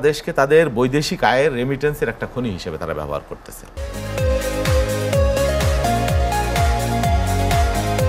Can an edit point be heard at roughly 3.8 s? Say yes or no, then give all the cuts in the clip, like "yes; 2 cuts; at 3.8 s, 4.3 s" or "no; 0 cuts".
no; 0 cuts